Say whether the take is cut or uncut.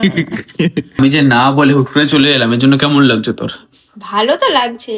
uncut